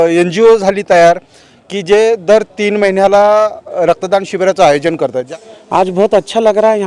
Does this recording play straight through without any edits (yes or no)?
no